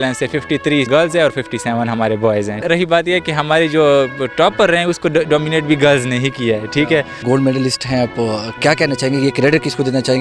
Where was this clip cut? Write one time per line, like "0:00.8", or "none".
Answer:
0:00.9
0:02.6
0:07.2